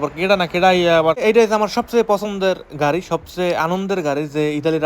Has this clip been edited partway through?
yes; 1 cut; at 1.2 s

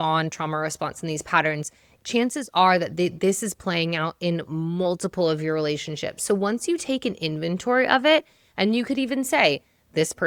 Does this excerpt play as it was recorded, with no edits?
yes; 0 cuts

